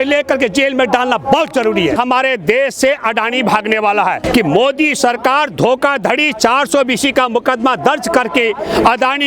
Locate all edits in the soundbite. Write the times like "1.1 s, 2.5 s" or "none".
1.9 s, 4.2 s

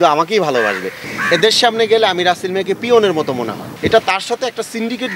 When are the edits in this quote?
1.0 s, 3.6 s

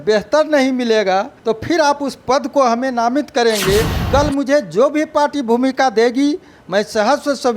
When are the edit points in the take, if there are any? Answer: 1.3 s, 4.0 s

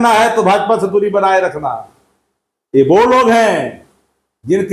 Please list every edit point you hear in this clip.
none

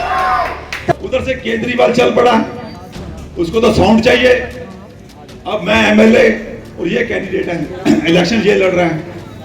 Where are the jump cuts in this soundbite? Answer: 0.9 s

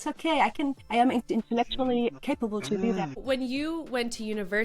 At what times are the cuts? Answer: 0.8 s, 2.2 s, 3.2 s

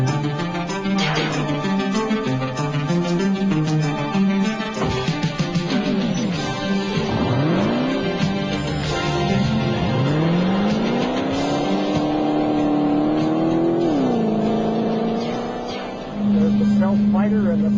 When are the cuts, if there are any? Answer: none

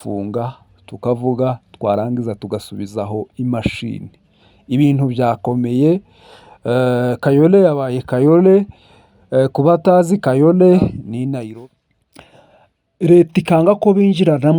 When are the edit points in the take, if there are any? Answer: 11.4 s

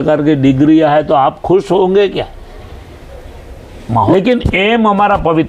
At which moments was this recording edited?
4.1 s

